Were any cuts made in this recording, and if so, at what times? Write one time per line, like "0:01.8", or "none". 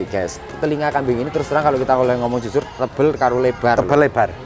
none